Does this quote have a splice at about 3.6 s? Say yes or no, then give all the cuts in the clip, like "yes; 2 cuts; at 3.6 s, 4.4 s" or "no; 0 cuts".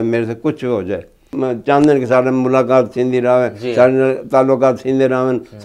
no; 1 cut; at 1.3 s